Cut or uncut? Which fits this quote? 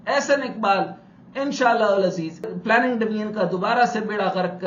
uncut